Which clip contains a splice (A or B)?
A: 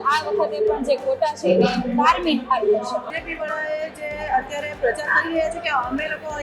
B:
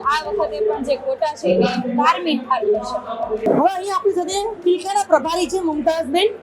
A